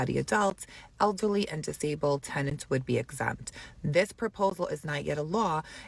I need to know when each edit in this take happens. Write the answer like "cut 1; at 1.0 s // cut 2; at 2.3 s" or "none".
none